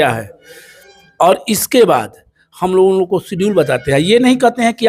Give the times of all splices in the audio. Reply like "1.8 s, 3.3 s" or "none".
none

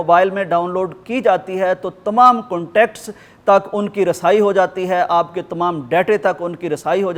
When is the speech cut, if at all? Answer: none

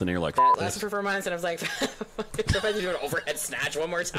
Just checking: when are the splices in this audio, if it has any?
none

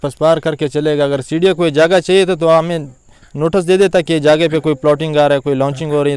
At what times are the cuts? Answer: none

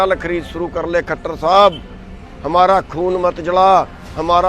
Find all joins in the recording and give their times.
none

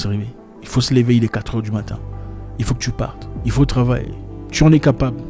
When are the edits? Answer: none

